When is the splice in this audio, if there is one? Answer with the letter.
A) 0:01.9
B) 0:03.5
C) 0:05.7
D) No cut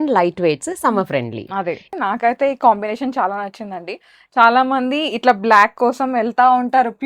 A